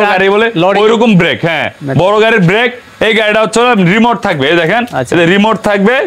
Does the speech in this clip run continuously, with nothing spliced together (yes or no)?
yes